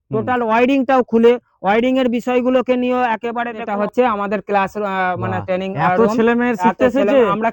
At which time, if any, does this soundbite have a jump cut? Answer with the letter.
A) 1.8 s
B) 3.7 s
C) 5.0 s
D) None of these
B